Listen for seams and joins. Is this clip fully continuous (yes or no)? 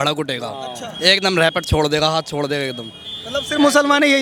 yes